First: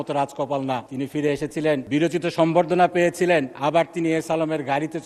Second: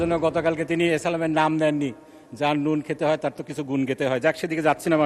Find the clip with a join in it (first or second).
first